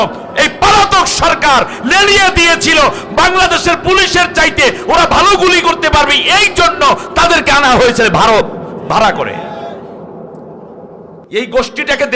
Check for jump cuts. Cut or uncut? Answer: cut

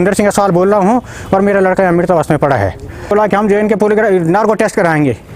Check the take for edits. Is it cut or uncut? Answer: cut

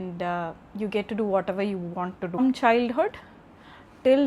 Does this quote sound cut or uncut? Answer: cut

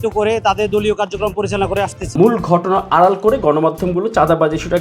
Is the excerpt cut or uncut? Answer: cut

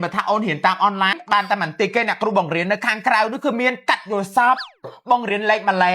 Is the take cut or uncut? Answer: cut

